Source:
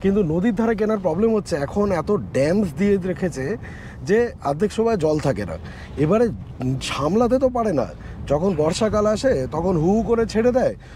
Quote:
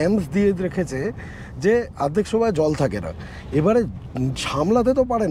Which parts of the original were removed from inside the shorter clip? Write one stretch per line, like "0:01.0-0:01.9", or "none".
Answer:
none